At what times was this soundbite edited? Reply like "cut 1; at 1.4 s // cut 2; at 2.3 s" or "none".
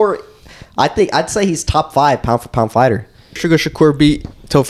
cut 1; at 3.4 s